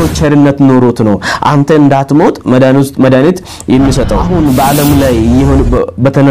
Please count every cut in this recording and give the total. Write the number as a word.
one